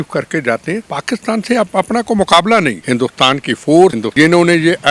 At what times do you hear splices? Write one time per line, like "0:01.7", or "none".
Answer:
0:00.9
0:02.8
0:04.0